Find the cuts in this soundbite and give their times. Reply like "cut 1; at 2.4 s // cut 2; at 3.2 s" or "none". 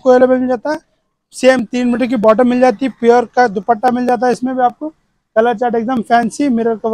none